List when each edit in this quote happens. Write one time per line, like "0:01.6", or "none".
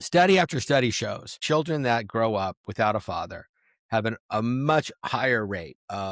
0:01.3